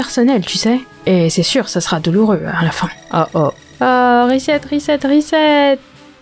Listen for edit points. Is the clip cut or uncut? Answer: cut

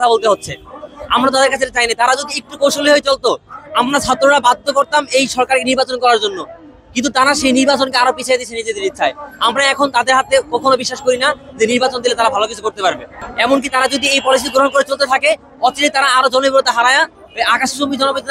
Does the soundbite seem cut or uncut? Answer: uncut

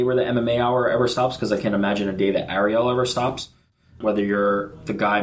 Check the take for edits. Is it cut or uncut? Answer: cut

